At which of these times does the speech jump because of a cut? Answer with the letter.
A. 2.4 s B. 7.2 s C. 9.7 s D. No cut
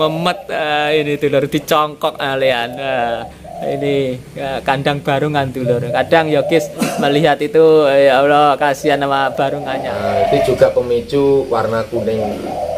C